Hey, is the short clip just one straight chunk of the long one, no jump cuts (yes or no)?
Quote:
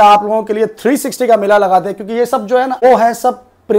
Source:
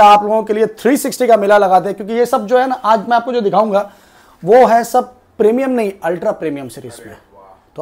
no